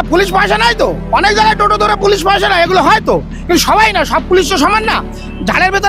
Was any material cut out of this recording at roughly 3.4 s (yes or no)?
no